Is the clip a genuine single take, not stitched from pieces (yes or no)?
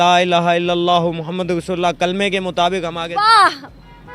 yes